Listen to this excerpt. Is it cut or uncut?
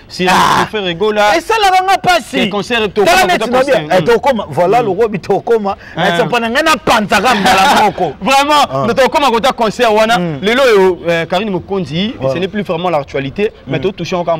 uncut